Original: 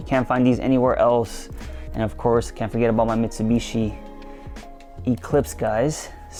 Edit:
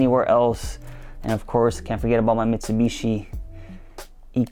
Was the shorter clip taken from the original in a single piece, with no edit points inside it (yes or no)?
yes